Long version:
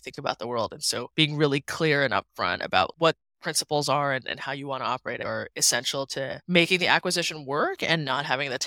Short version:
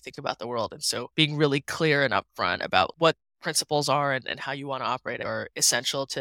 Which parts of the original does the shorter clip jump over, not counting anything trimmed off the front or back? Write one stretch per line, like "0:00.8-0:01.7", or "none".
none